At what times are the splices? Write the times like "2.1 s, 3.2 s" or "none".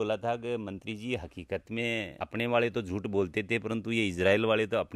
none